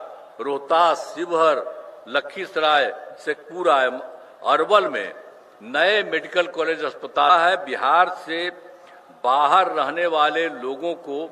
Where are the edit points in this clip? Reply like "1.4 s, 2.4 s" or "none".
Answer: 7.3 s